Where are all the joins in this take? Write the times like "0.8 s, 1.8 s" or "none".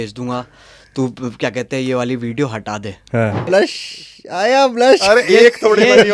3.4 s